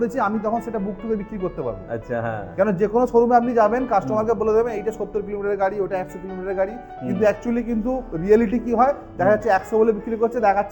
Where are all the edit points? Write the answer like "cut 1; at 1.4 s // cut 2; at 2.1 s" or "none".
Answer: none